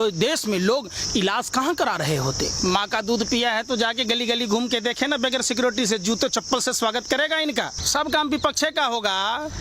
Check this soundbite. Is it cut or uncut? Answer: cut